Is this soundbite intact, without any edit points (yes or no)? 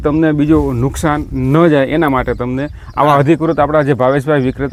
yes